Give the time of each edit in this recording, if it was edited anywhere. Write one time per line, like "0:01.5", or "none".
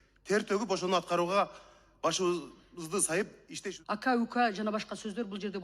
0:03.5